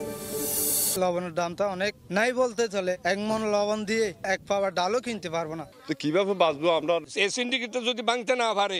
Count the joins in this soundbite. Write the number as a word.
three